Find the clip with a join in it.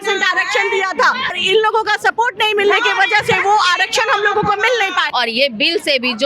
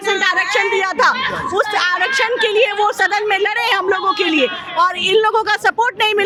first; 2 cuts; at 1.4 s, 5.1 s

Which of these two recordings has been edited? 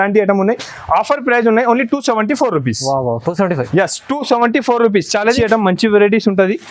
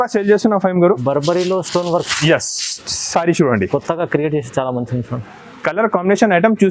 first; 1 cut; at 5.4 s

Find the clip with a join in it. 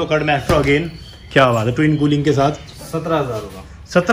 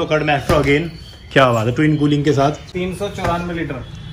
second; 1 cut; at 2.7 s

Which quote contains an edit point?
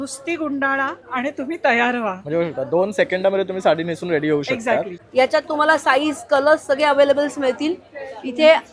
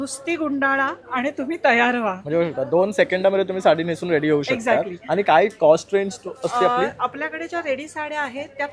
first; 1 cut; at 5.0 s

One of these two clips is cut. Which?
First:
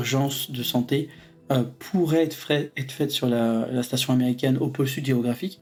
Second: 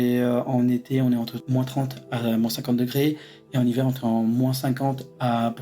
second; 1 cut; at 1.4 s

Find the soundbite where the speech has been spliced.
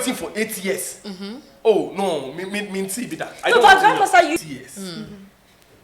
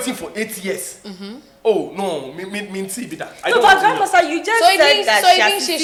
first; 1 cut; at 4.4 s

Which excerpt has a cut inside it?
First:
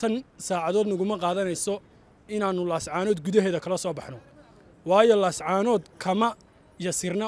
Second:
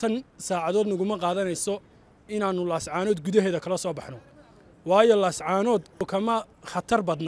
second; 1 cut; at 6.0 s

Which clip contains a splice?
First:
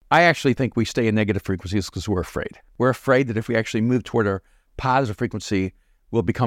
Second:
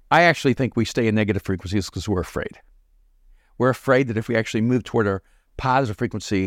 first; 1 cut; at 2.6 s

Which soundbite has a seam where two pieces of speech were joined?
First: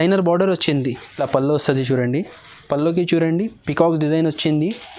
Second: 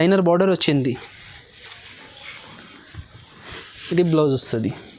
first; 1 cut; at 1.1 s

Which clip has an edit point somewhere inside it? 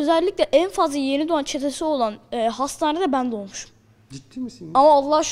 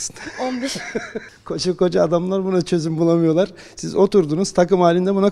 second; 1 cut; at 1.3 s

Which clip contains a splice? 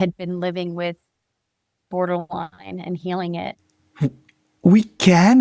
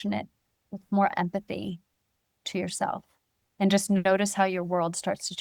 first; 1 cut; at 3.6 s

